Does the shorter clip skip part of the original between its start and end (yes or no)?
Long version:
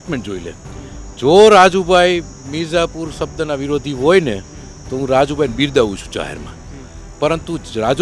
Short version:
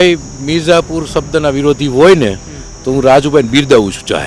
no